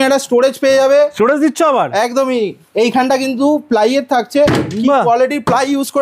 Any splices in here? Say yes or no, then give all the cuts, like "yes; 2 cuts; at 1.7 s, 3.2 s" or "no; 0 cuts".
no; 0 cuts